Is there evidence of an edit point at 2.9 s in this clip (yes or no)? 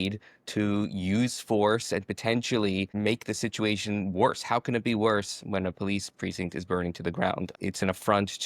yes